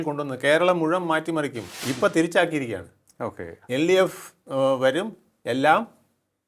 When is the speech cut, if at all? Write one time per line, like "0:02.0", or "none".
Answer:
0:01.7